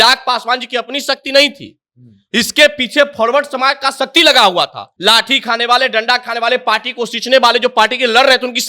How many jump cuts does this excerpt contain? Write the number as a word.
one